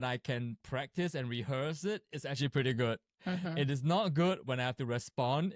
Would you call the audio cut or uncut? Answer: uncut